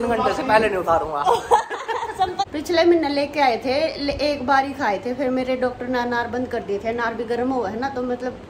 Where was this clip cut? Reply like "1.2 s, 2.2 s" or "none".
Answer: 2.5 s

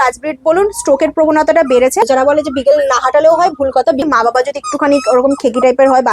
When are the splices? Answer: 2.1 s, 4.0 s

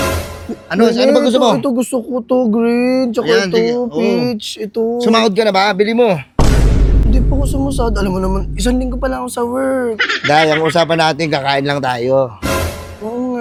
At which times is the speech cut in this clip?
none

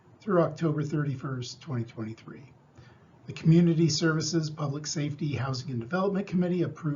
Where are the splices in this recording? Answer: 5.1 s

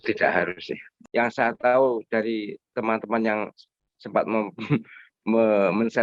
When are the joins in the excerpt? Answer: 0.9 s

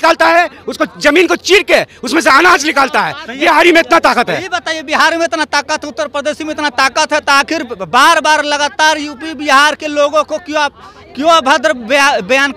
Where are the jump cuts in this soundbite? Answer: none

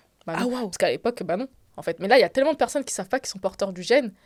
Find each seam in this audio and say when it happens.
none

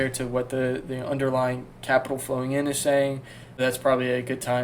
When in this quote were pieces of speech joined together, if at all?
3.6 s

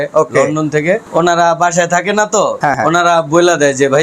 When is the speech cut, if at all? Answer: 1.1 s, 2.7 s

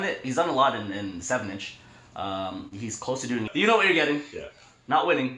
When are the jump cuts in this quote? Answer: 3.5 s

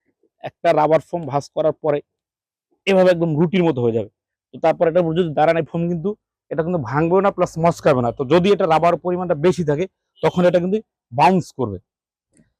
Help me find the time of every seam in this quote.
none

